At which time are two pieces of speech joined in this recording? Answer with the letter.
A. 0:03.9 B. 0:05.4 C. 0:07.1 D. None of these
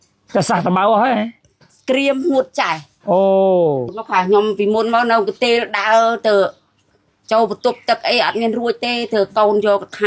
A